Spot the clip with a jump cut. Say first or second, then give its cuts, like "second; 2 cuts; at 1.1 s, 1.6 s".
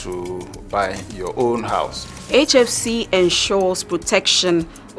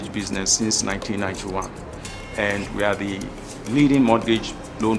first; 1 cut; at 2.1 s